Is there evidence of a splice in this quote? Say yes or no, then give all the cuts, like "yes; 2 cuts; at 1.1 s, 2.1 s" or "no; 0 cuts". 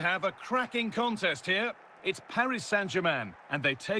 yes; 1 cut; at 1.9 s